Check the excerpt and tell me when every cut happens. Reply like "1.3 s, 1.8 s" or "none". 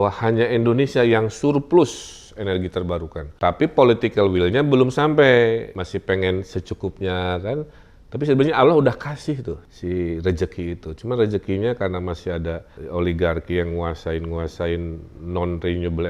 3.4 s, 5.8 s, 9.7 s, 12.7 s